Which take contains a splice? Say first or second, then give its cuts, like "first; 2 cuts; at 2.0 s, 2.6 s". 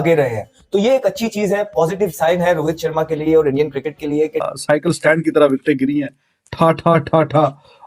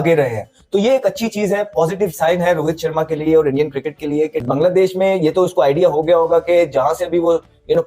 first; 1 cut; at 4.4 s